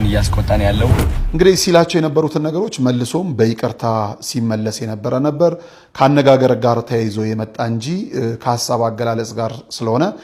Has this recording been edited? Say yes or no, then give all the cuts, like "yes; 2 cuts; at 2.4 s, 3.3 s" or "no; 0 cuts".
yes; 1 cut; at 1.1 s